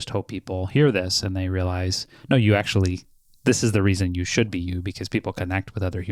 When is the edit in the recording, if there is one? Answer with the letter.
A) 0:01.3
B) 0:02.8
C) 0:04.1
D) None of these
D